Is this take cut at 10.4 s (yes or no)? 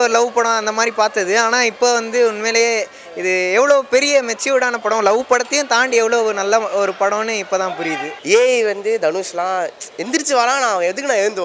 no